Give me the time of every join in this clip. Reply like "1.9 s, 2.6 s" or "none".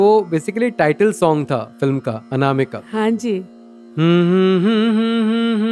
3.4 s